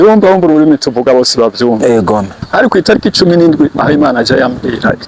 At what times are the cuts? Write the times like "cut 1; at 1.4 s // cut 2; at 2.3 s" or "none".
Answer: cut 1; at 2.4 s

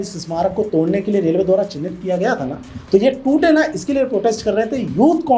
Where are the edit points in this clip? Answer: none

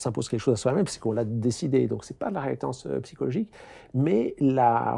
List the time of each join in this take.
none

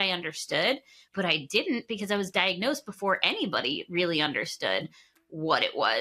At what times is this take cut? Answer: cut 1; at 1.1 s

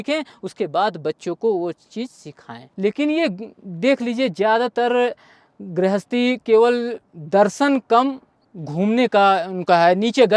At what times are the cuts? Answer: cut 1; at 2.6 s

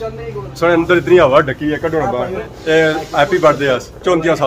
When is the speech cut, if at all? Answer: cut 1; at 2.4 s

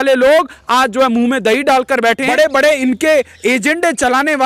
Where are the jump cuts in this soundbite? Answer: cut 1; at 2.2 s

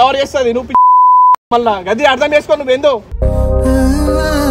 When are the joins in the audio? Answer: none

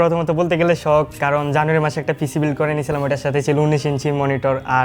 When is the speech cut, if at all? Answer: cut 1; at 1.1 s

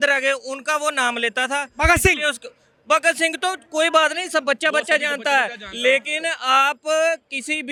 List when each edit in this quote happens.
none

